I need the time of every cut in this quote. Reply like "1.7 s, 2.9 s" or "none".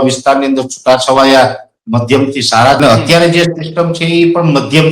2.8 s